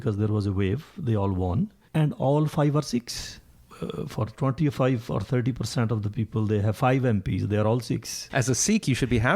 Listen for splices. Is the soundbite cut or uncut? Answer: cut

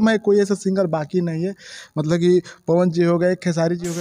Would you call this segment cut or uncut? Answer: uncut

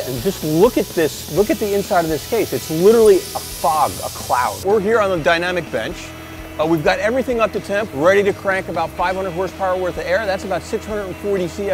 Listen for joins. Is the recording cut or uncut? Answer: cut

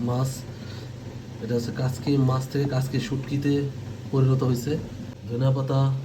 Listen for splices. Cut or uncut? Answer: cut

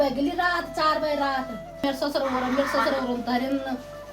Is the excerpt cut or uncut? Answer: cut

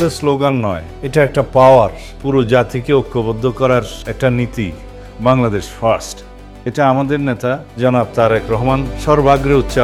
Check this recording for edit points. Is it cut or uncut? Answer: uncut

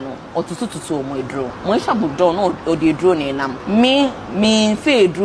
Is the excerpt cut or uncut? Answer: cut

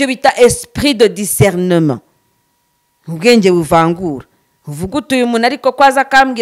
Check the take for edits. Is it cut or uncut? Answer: uncut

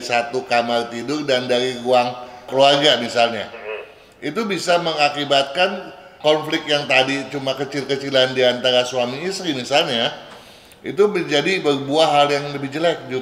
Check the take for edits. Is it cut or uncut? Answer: uncut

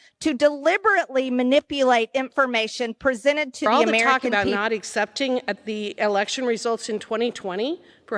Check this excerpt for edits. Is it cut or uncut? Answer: cut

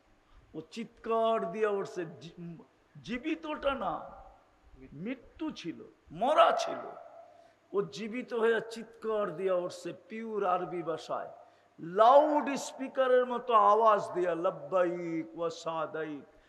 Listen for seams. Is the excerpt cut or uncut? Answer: uncut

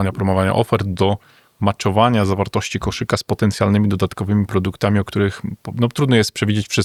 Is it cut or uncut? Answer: uncut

